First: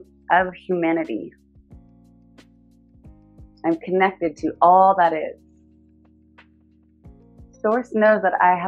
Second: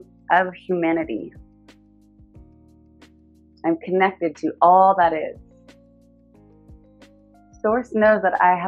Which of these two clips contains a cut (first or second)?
second